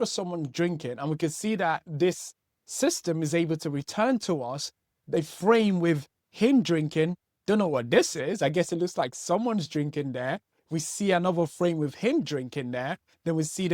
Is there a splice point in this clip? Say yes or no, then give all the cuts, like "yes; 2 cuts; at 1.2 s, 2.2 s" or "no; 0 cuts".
yes; 1 cut; at 1.8 s